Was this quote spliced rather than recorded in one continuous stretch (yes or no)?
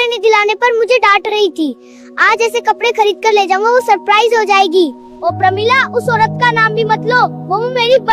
yes